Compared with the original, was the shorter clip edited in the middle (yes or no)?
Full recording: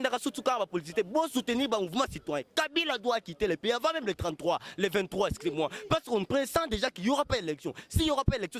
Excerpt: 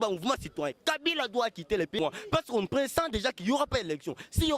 yes